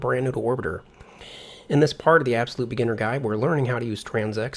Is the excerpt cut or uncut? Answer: uncut